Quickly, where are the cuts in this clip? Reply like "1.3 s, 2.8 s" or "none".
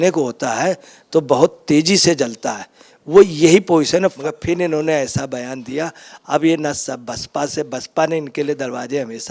4.2 s